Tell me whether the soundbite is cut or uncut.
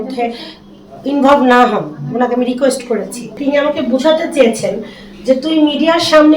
cut